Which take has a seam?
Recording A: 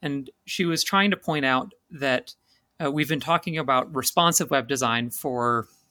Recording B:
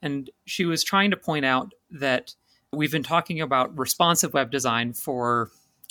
B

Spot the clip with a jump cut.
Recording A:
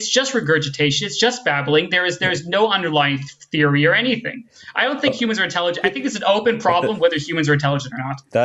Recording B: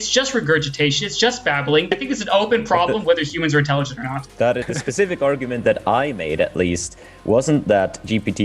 B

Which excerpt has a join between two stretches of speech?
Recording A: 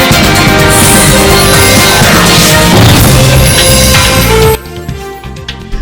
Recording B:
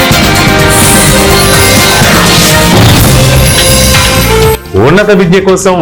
A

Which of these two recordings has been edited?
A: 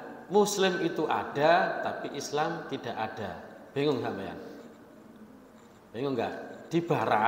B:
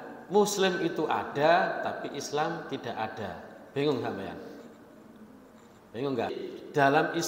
B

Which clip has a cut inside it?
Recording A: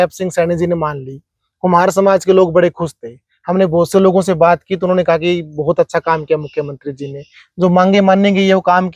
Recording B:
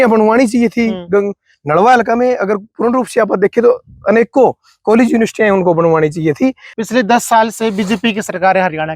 B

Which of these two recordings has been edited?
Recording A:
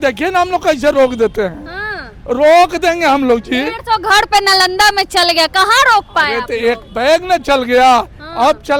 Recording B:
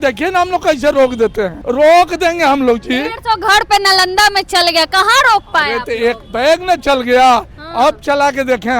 B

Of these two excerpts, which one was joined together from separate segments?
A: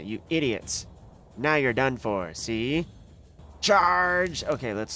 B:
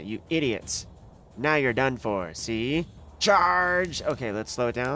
B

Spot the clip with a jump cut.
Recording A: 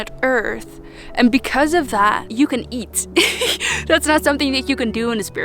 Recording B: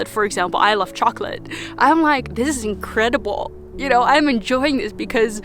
A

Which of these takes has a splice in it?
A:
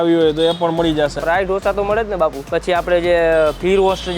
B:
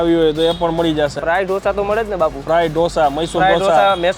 A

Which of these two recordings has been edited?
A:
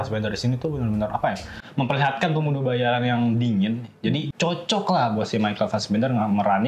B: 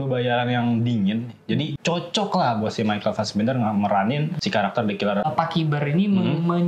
B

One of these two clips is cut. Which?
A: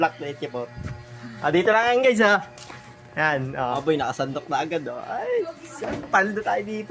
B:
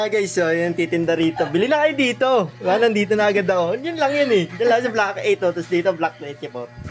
A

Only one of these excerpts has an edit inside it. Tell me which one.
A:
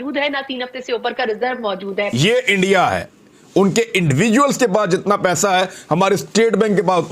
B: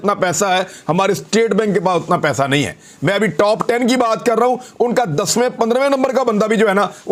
A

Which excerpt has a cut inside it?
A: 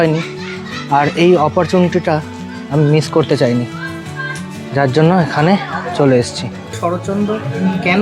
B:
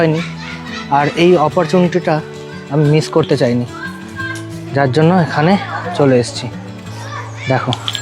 A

